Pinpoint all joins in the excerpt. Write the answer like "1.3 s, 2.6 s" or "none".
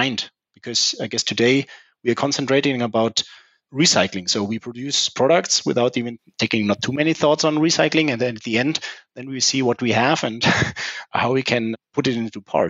11.7 s